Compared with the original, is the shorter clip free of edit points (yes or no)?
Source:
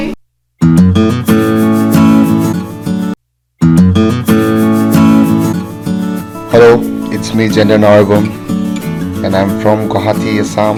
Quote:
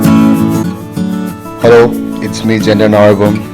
no